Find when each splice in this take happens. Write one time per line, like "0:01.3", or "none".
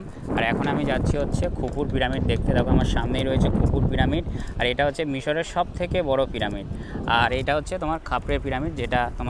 none